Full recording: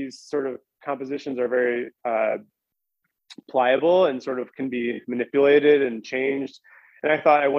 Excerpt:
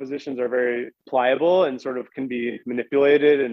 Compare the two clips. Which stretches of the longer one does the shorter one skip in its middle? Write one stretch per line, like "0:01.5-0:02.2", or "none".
0:01.9-0:03.4